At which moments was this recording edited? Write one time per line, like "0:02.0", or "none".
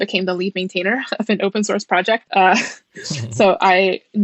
0:02.2

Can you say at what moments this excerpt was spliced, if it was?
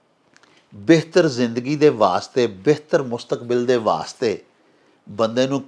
none

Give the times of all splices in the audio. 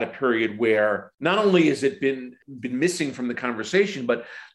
0:01.1
0:02.3

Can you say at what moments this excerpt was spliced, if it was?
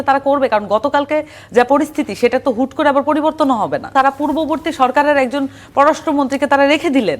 0:03.9

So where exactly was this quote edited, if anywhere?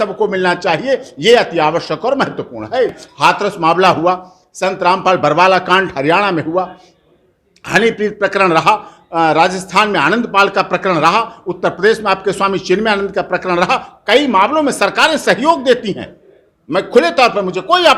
0:03.0

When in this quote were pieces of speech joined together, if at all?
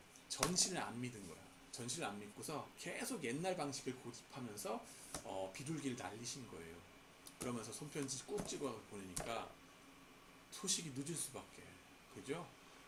none

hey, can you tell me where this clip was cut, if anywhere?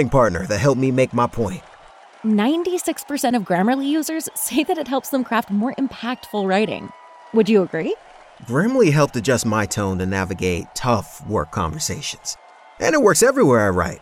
0:01.7

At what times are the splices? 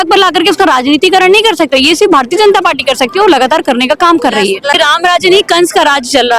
0:04.8

